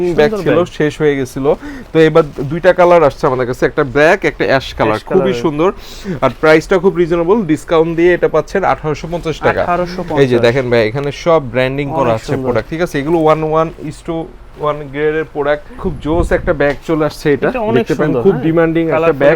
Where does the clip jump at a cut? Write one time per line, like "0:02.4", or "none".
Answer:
none